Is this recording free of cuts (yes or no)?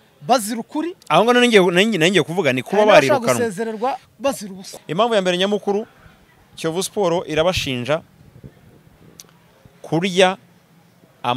no